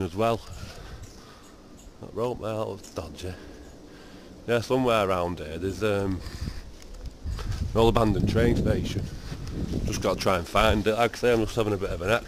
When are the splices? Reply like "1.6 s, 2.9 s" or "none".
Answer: 10.7 s